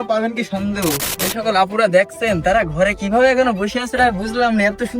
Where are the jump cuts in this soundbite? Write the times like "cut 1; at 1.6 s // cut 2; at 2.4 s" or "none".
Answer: cut 1; at 1.1 s